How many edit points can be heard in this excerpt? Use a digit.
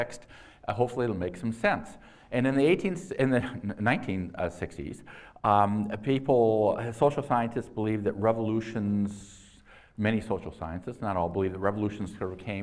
1